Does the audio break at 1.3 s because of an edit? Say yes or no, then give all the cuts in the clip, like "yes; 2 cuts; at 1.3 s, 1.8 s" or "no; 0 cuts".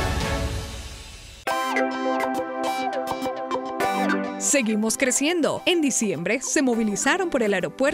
yes; 1 cut; at 1.3 s